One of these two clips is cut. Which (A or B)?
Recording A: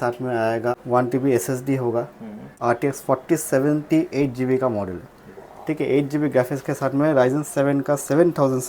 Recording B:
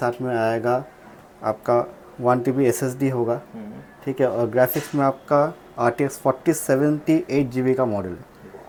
A